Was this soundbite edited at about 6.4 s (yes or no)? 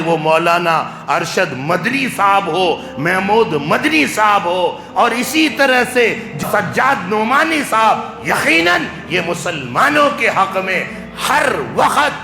yes